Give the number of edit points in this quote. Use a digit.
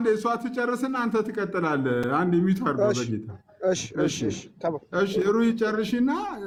0